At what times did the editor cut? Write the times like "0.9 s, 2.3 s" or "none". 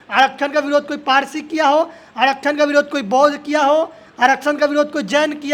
none